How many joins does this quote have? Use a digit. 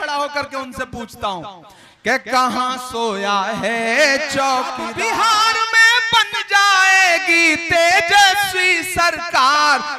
1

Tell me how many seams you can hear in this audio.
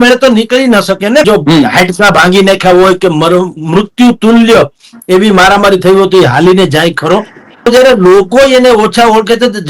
2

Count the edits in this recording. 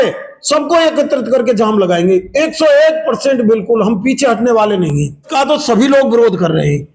1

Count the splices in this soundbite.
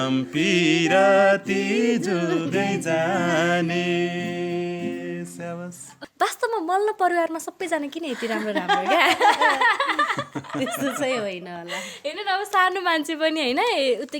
1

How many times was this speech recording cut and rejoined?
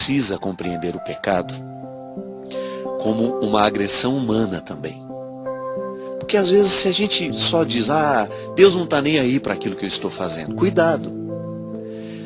1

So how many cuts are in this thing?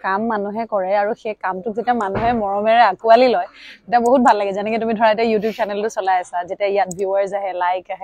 0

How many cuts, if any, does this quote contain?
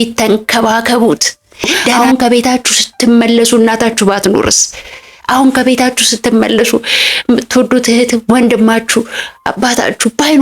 1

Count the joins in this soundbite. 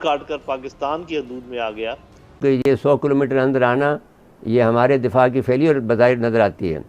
1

